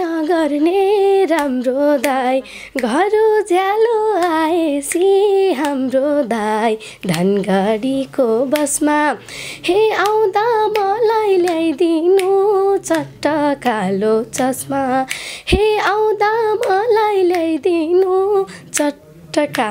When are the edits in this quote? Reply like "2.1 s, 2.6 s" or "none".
none